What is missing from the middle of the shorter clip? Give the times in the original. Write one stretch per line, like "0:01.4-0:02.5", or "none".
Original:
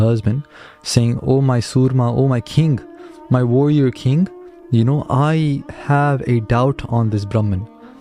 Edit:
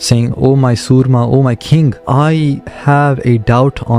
0:02.9-0:05.0